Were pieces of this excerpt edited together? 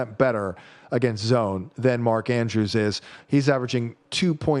no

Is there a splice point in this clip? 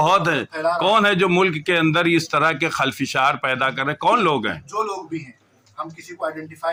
no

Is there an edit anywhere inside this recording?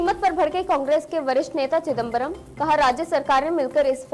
no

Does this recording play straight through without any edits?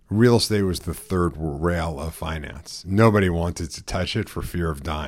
yes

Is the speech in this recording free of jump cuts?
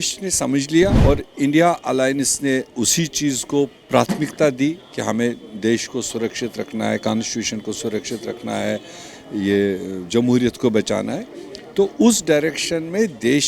no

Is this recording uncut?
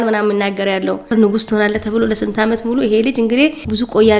yes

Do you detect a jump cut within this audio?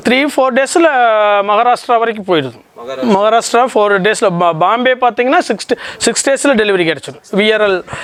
no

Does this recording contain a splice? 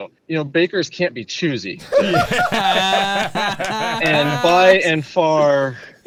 no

